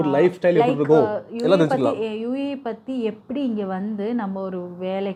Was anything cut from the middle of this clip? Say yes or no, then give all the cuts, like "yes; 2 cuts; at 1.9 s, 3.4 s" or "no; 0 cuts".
no; 0 cuts